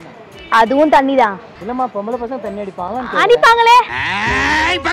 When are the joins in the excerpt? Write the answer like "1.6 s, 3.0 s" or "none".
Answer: 1.5 s

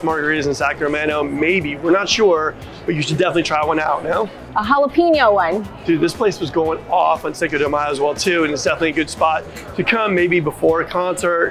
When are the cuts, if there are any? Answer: none

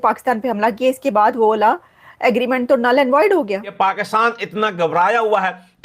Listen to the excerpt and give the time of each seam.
3.7 s

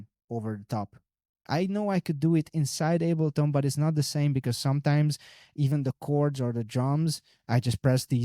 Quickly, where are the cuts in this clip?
1.3 s

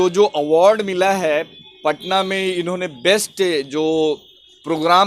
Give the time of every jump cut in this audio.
none

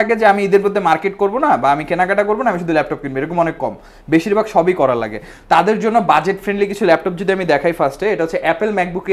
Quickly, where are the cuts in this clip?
none

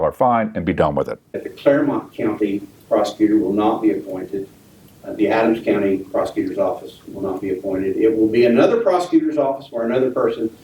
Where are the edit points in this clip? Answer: 1.5 s

